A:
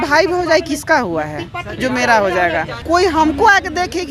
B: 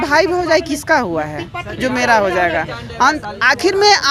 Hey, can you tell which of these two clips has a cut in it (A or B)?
A